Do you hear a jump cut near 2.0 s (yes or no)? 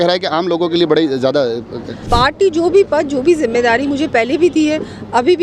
yes